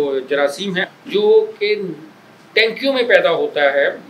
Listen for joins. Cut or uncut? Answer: cut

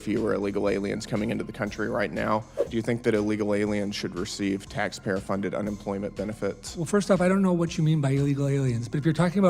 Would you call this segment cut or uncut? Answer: cut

